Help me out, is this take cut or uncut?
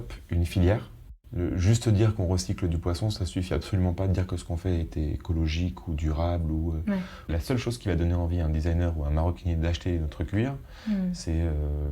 cut